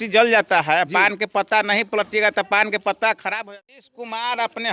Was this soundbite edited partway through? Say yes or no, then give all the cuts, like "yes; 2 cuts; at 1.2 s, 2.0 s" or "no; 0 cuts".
yes; 1 cut; at 3.5 s